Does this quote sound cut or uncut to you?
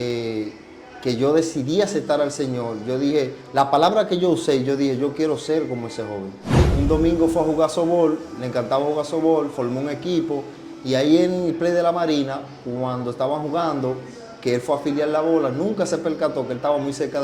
cut